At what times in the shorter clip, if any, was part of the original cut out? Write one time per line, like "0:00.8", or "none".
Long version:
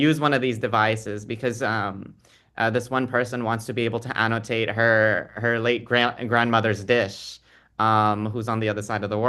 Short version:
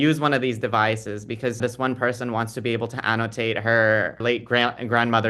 0:01.6
0:04.2